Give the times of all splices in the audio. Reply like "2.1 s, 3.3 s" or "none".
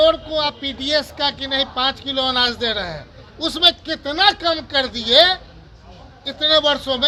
none